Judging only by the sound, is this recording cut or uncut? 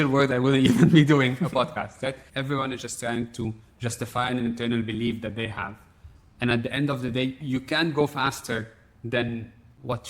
cut